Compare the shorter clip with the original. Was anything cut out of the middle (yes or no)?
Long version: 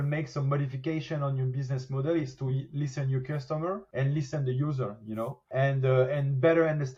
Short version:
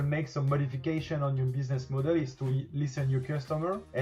no